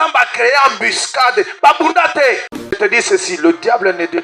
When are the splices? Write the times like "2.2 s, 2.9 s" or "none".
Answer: 2.7 s